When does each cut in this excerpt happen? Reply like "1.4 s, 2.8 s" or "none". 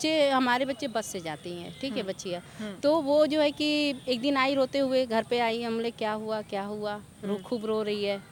none